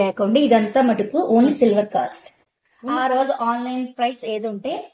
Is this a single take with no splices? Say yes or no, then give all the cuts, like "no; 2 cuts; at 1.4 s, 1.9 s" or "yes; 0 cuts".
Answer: yes; 0 cuts